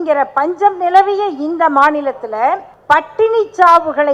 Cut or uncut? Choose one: cut